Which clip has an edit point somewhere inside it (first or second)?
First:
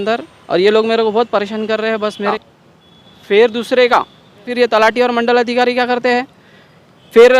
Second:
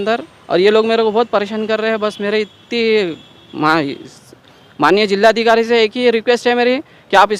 first